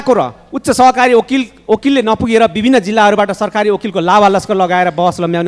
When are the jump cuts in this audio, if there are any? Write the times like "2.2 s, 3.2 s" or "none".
none